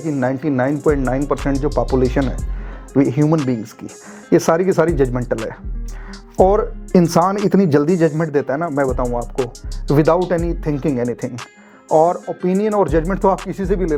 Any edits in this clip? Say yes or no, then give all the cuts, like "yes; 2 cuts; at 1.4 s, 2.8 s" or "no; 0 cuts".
no; 0 cuts